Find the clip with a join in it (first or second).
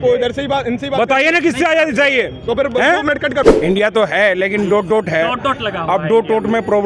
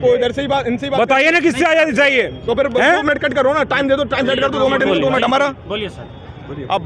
first